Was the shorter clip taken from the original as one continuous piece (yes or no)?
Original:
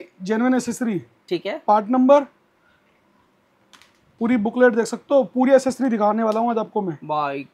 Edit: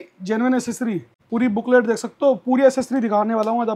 no